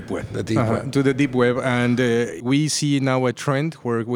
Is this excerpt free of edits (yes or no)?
no